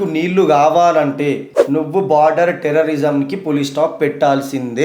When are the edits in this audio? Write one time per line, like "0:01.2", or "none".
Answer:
0:01.5